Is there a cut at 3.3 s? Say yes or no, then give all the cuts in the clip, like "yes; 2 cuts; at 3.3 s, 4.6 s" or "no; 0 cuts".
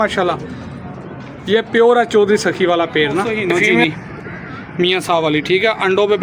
yes; 1 cut; at 3.3 s